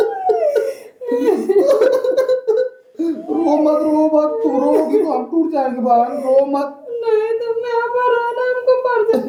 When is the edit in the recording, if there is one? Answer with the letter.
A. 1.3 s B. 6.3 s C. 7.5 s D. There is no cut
D